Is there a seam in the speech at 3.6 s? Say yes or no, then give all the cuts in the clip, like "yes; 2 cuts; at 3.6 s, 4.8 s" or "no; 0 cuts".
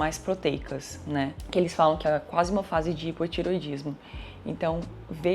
no; 1 cut; at 1.4 s